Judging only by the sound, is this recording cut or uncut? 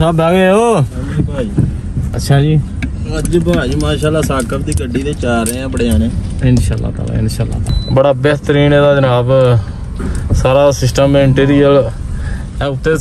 cut